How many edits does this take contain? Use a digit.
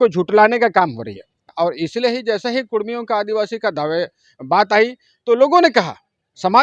1